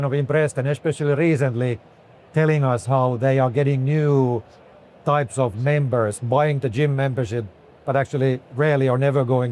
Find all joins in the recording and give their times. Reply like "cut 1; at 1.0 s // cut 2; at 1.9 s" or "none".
none